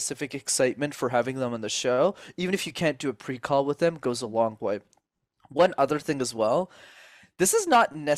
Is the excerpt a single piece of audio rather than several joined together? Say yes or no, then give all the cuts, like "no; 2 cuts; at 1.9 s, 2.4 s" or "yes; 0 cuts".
yes; 0 cuts